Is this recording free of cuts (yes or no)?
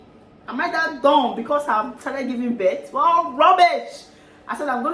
yes